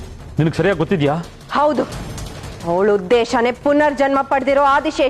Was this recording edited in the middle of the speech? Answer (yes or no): yes